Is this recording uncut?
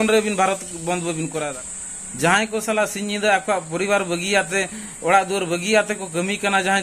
no; 1 cut; at 1.6 s

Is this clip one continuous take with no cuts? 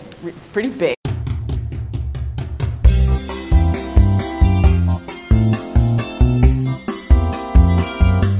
yes; 0 cuts

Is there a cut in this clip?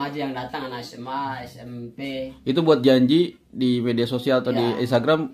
no; 0 cuts

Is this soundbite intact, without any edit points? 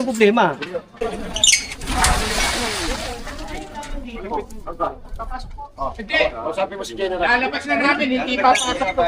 no; 1 cut; at 1.0 s

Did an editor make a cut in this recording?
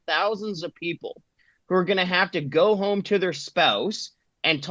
no; 0 cuts

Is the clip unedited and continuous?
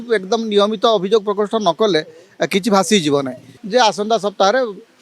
no; 1 cut; at 3.5 s

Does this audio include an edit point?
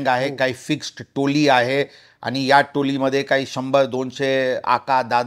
no; 0 cuts

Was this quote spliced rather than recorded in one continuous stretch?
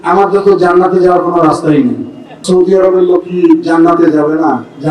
yes; 1 cut; at 2.4 s

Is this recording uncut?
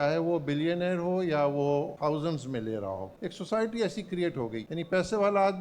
no; 3 cuts; at 1.9 s, 3.1 s, 4.6 s

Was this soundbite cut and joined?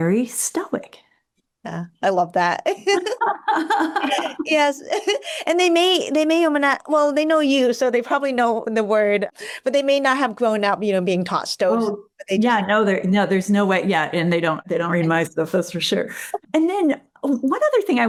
no; 0 cuts

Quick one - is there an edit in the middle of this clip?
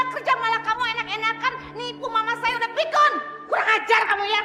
no; 0 cuts

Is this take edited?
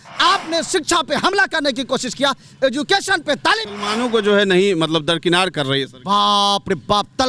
yes; 1 cut; at 3.7 s

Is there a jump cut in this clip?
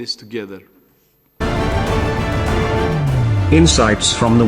yes; 1 cut; at 1.4 s

